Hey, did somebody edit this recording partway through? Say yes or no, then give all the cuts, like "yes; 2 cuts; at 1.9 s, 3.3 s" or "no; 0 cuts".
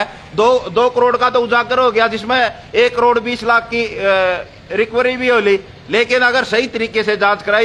no; 0 cuts